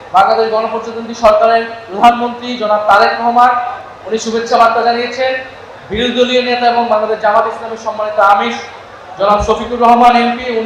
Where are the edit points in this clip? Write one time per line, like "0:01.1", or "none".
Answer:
none

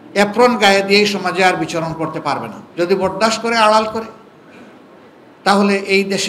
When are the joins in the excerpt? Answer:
0:02.6

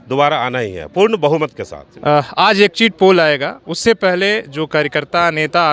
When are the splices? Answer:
none

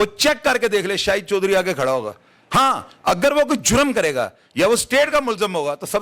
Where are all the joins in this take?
none

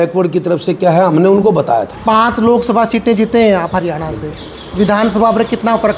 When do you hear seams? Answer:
0:01.9

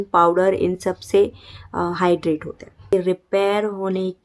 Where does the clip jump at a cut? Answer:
0:02.9

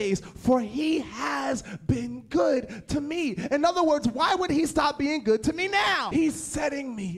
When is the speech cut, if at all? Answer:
0:06.1

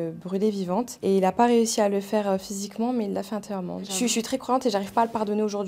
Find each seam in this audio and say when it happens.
0:03.9

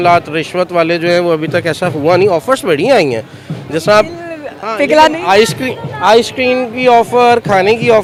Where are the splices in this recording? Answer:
none

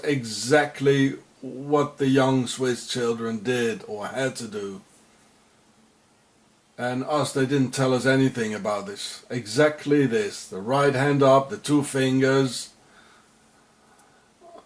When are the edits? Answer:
none

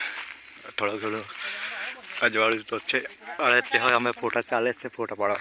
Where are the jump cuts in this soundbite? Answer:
none

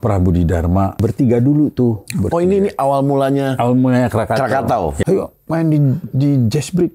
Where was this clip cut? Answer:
0:01.0
0:05.0

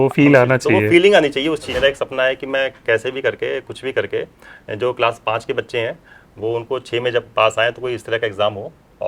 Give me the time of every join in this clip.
0:01.7

